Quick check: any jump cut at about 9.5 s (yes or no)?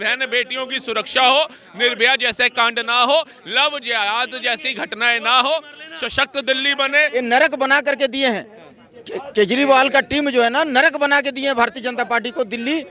no